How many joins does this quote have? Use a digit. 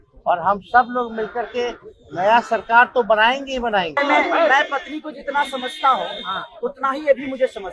1